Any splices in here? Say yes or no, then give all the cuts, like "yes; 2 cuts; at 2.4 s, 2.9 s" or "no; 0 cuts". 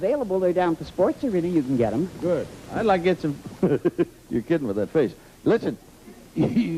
no; 0 cuts